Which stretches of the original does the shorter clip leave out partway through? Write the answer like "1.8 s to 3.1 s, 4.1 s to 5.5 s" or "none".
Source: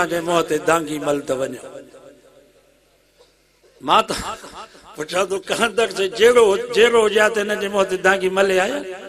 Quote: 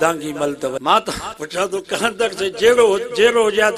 1.5 s to 3.8 s, 4.4 s to 4.9 s